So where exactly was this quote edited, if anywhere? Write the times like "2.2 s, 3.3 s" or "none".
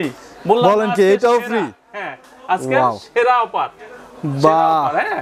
none

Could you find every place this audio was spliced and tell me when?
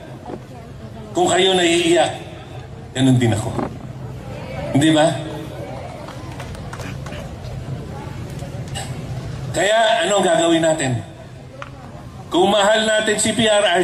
none

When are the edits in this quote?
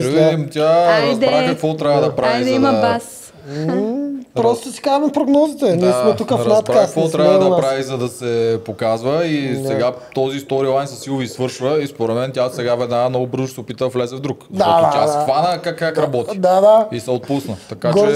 none

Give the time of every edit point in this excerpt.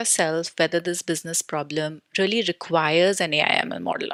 none

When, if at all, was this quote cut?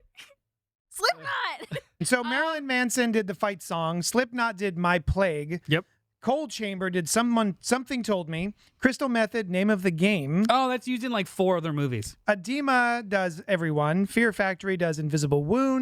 2.0 s

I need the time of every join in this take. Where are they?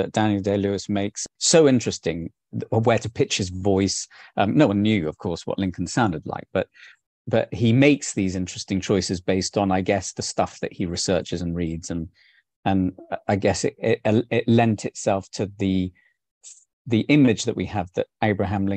1.3 s

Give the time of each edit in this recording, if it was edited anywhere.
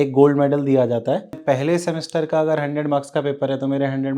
1.4 s

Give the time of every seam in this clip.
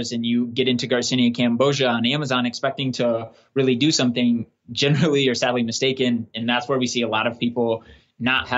none

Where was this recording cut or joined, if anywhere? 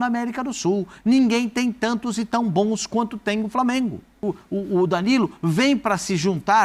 4.2 s

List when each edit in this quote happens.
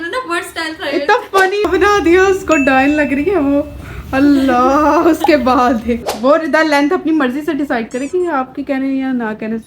1.7 s, 6.1 s

